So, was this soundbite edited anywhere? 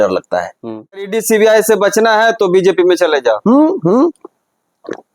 yes; 1 cut; at 1.1 s

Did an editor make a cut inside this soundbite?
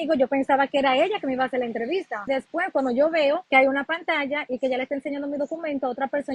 yes; 2 cuts; at 2.3 s, 3.4 s

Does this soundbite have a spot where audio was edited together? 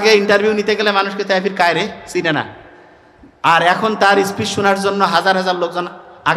no; 0 cuts

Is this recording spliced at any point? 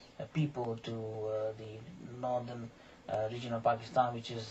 yes; 1 cut; at 3.0 s

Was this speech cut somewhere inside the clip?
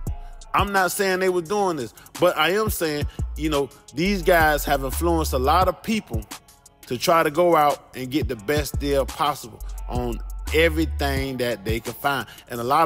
no; 0 cuts

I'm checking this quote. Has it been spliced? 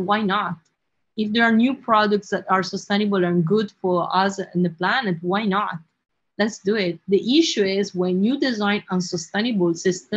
no; 0 cuts

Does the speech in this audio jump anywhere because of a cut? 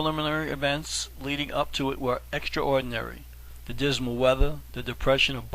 yes; 1 cut; at 2.9 s

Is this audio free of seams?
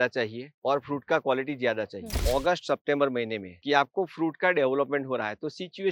no; 1 cut; at 2.1 s

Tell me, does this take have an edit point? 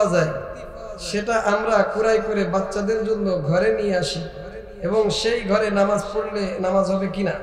no; 0 cuts

